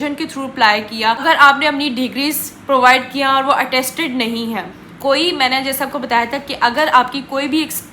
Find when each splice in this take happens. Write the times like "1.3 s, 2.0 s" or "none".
1.2 s